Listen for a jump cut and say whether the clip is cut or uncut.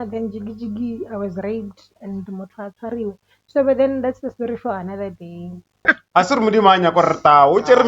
cut